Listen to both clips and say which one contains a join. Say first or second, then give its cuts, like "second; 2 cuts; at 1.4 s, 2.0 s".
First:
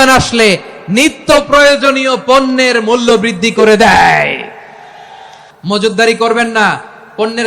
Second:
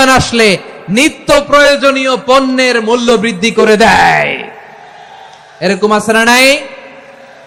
first; 1 cut; at 5.4 s